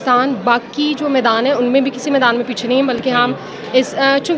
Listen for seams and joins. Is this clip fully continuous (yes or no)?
yes